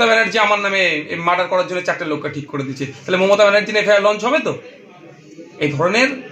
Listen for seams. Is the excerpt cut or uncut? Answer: uncut